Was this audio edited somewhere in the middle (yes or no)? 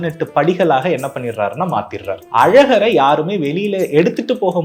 yes